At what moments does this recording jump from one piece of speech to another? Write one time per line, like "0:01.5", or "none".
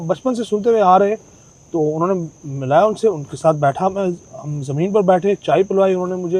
none

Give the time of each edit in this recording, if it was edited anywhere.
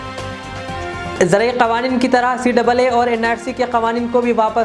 0:01.0

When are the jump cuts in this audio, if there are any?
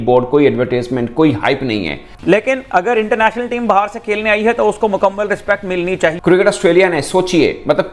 0:02.1
0:06.1

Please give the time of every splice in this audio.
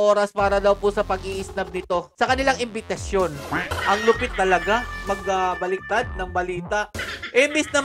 0:03.7
0:06.9

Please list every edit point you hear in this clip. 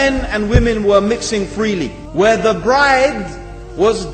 0:02.0

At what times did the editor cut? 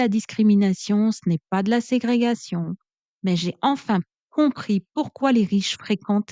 none

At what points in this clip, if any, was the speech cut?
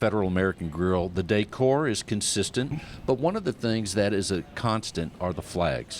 0:02.8

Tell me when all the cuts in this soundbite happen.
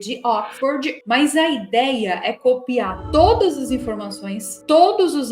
0:01.0

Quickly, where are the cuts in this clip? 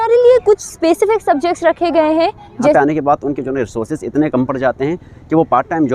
0:02.2

